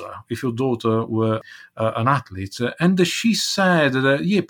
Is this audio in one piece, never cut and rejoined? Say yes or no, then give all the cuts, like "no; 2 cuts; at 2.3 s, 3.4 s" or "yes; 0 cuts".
no; 1 cut; at 1.4 s